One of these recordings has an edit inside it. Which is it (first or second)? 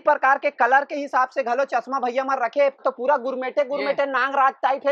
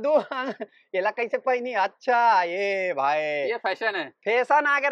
first